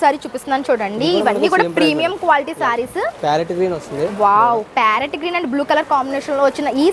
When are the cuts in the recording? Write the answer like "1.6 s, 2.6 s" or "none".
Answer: none